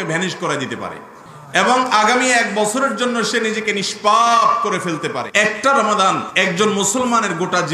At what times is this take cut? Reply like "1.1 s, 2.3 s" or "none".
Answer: 5.2 s, 6.3 s